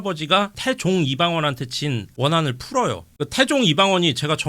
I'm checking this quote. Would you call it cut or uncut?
cut